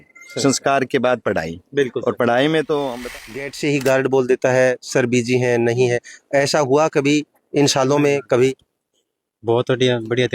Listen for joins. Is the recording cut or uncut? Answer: cut